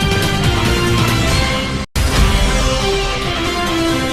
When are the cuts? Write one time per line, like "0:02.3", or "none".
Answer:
none